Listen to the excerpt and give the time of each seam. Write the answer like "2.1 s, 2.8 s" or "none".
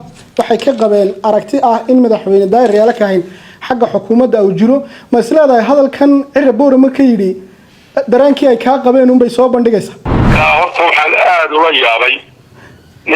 10.3 s